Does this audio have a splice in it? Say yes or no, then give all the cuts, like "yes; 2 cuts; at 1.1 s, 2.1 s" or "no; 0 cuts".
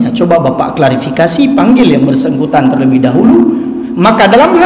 no; 0 cuts